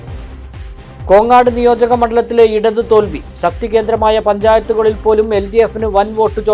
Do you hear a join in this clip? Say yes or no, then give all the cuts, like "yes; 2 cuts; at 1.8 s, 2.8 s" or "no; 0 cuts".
yes; 1 cut; at 1.0 s